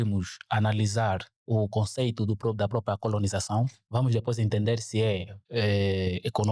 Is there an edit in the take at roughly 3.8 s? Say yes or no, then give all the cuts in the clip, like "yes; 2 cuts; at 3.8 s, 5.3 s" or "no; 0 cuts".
yes; 2 cuts; at 3.8 s, 5.4 s